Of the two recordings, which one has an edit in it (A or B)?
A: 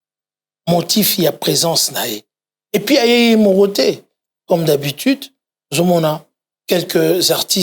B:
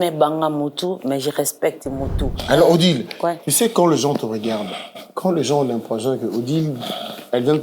B